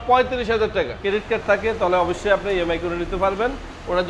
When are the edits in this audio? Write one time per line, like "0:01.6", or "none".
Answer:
0:01.0